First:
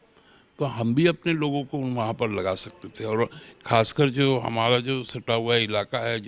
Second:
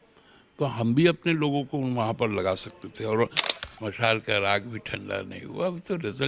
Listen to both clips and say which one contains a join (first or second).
second